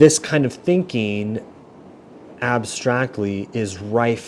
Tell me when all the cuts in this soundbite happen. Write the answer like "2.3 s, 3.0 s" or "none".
none